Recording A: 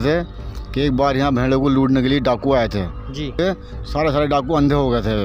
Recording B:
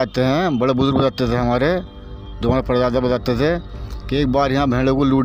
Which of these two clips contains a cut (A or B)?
A